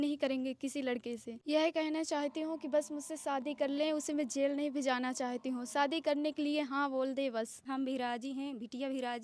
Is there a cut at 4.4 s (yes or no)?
no